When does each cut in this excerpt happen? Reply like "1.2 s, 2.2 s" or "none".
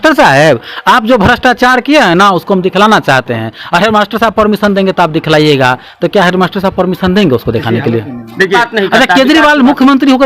8.6 s

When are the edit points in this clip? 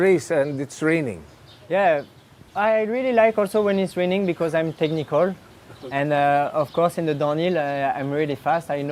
none

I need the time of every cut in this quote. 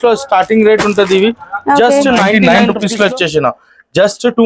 2.4 s

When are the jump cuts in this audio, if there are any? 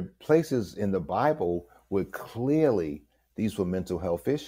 none

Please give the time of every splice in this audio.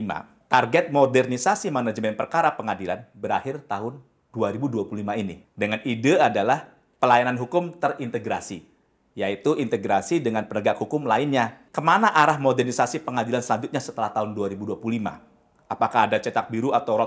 5.4 s, 11.6 s

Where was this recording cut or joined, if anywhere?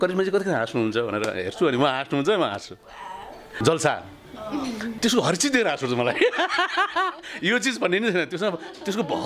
3.4 s, 5.0 s

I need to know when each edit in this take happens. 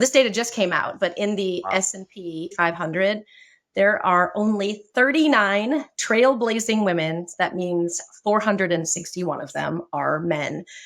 2.5 s

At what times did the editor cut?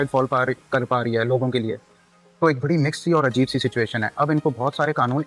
none

